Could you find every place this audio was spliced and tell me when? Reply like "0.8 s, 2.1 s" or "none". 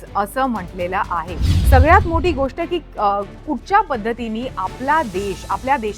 1.5 s